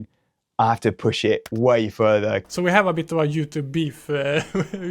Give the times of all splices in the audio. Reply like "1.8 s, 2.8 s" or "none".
2.5 s